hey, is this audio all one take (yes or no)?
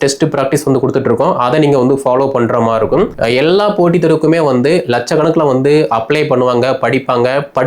no